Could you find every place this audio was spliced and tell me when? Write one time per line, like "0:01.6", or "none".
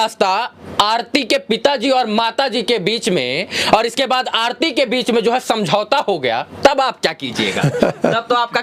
none